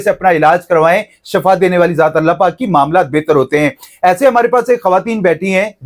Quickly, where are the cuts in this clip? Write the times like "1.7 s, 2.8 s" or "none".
none